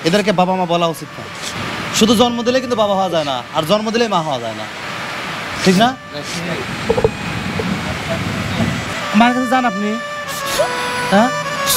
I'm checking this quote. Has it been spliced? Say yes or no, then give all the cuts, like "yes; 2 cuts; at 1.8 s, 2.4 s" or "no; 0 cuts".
yes; 1 cut; at 8.9 s